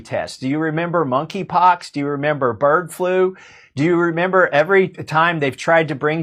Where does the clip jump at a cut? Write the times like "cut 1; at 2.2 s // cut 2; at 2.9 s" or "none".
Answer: none

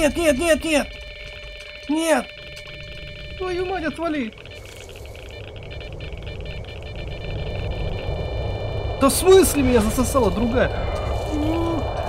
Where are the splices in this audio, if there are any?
none

